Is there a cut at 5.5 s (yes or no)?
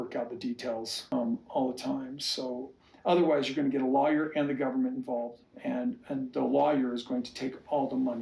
yes